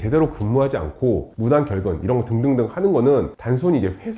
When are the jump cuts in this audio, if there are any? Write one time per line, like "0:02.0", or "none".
none